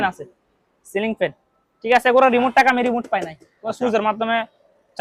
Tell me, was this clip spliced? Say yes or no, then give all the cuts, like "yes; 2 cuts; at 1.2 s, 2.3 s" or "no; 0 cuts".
no; 0 cuts